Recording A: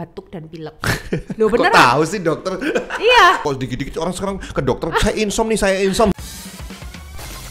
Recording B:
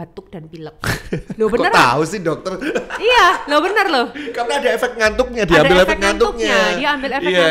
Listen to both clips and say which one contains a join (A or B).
A